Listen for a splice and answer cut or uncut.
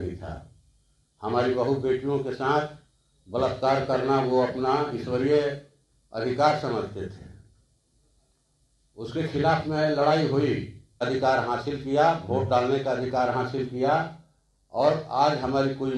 cut